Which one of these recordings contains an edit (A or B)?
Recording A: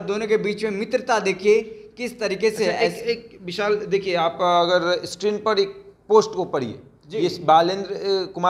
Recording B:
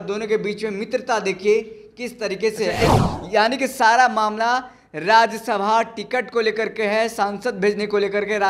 B